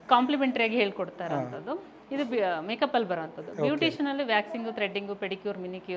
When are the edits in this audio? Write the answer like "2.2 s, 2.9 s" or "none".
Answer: none